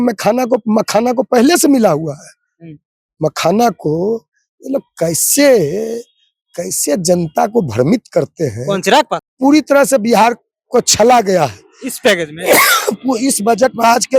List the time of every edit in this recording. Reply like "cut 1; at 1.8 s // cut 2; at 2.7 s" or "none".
cut 1; at 9.2 s